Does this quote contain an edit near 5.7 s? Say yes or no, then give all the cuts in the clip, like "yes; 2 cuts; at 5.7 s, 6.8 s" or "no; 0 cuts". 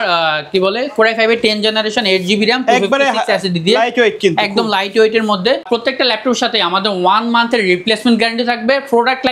yes; 1 cut; at 5.7 s